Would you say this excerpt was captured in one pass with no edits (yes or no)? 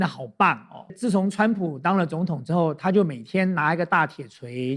no